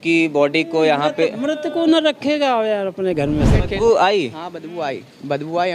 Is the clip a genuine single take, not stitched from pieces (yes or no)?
no